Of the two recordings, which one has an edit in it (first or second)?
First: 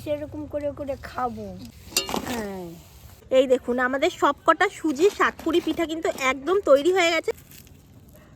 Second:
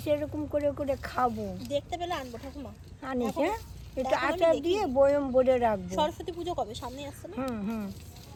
first